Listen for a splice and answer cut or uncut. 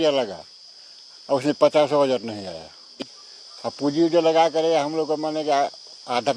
cut